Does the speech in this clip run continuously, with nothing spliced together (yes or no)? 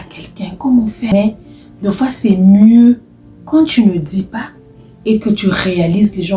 no